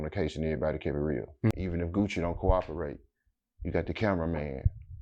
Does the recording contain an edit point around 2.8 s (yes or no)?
no